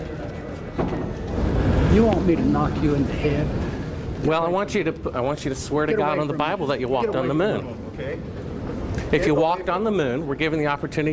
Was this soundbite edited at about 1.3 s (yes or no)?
yes